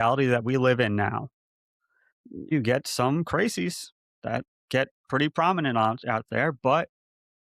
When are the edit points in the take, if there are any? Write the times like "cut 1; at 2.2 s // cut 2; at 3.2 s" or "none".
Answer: cut 1; at 2.5 s